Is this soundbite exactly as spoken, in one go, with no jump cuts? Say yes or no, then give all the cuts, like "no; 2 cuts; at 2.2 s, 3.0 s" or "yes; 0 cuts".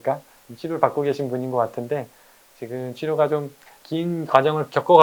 yes; 0 cuts